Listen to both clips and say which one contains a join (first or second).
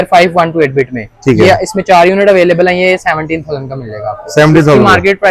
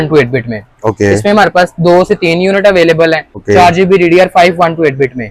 second